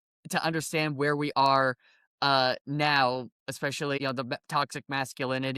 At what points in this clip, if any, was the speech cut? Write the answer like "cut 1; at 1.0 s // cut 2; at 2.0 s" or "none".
cut 1; at 4.0 s